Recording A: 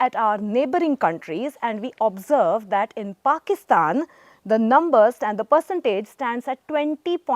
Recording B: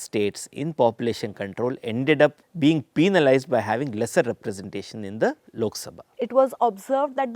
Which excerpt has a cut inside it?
B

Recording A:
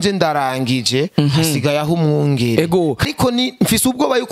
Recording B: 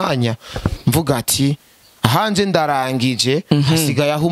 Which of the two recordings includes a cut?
A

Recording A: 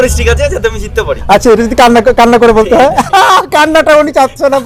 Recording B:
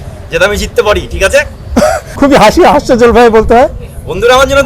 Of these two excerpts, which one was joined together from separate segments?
B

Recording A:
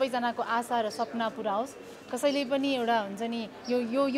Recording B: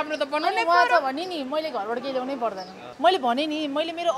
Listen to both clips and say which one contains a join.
B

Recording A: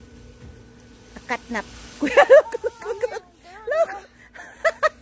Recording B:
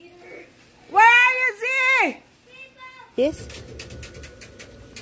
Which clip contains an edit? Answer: B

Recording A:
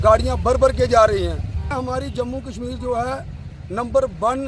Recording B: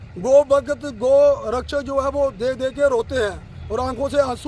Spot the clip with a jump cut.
A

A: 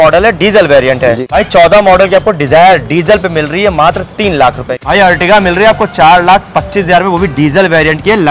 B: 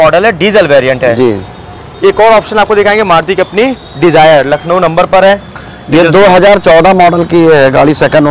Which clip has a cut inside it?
A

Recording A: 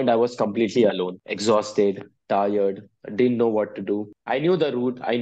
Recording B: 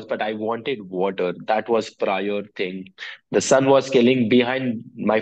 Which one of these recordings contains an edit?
A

